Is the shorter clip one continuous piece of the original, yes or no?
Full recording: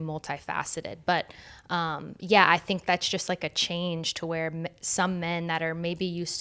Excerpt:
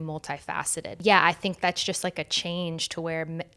no